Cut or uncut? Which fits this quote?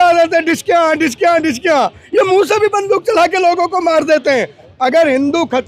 cut